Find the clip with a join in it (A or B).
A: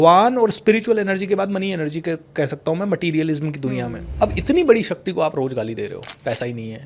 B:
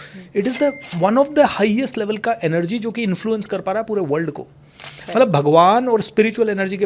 A